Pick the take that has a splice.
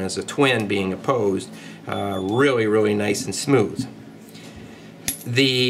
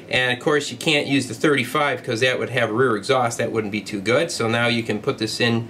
second; 1 cut; at 2.0 s

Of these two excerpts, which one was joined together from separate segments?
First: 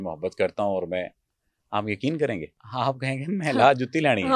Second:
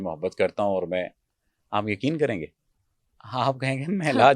first; 1 cut; at 2.6 s

